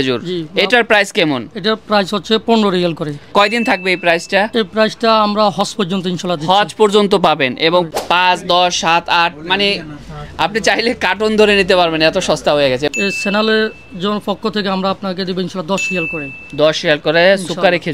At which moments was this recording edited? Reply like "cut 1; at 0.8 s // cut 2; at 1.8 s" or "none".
cut 1; at 3.3 s // cut 2; at 7.9 s // cut 3; at 12.9 s

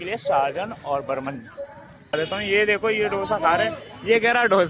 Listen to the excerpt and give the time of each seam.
cut 1; at 2.1 s

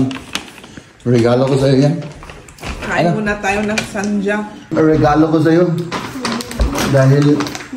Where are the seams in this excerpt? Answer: cut 1; at 4.7 s

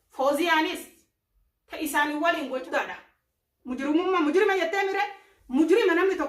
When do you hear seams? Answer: cut 1; at 2.7 s

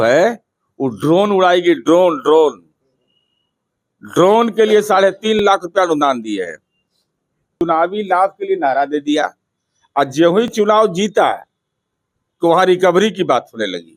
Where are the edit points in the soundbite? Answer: cut 1; at 7.6 s

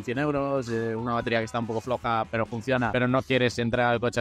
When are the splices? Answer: cut 1; at 2.9 s

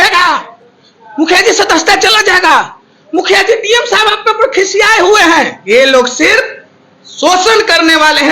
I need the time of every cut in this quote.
cut 1; at 5.6 s

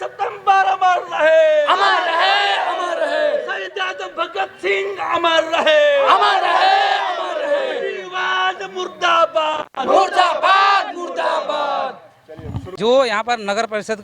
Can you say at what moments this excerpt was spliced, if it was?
cut 1; at 12.7 s

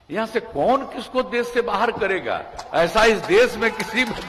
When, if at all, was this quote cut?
none

